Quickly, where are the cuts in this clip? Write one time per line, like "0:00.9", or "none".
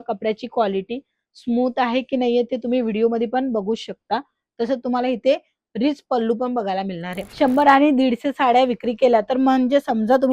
0:07.3